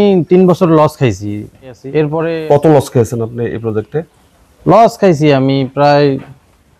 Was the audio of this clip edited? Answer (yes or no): yes